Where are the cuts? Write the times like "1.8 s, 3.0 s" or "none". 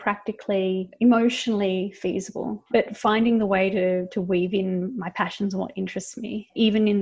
0.9 s, 2.9 s